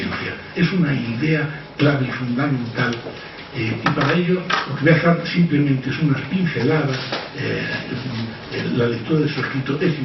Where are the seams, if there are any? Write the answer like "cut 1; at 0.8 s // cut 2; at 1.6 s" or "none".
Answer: none